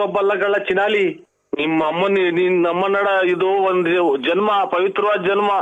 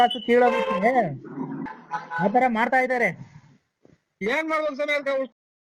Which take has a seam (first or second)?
second